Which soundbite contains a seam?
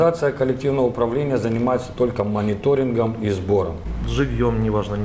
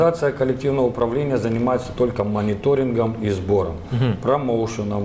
first; 1 cut; at 3.8 s

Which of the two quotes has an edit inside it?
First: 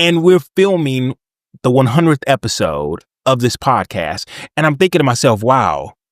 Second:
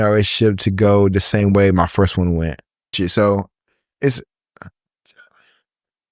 second; 1 cut; at 2.9 s

